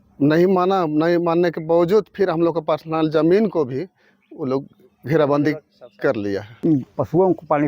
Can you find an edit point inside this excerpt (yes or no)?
yes